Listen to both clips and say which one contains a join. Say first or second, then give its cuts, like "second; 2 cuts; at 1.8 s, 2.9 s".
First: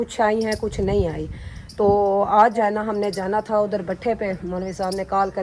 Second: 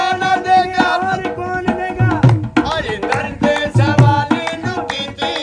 first; 1 cut; at 2.6 s